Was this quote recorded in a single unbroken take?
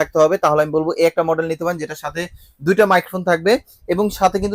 yes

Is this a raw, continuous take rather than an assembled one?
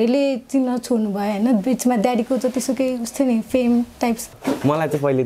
no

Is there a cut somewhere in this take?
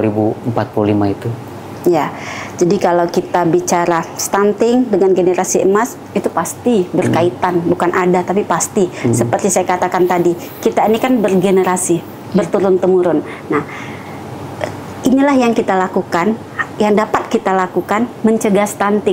no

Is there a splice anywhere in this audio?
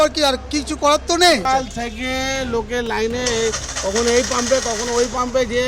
yes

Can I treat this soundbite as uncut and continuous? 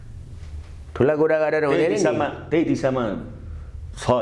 yes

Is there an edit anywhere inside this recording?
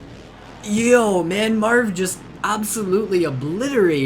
no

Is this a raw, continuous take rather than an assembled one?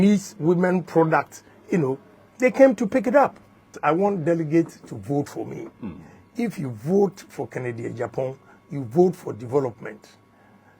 no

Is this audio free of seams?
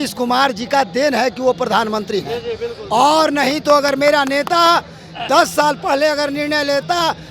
yes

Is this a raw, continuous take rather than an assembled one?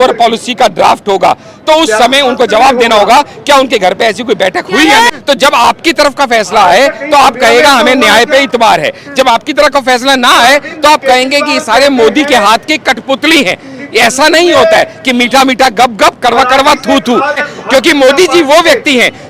no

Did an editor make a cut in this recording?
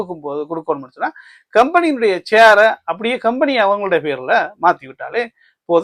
no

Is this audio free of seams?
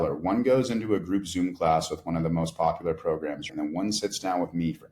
no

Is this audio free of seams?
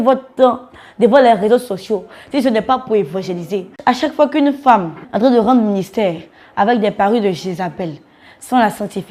no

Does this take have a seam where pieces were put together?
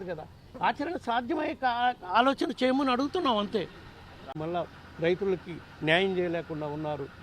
yes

